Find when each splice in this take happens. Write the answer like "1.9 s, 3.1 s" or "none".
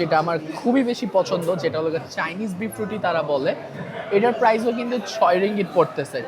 none